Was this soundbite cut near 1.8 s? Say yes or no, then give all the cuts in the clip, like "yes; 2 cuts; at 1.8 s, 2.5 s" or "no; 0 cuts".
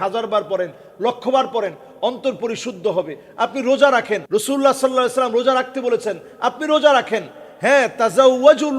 no; 1 cut; at 4.2 s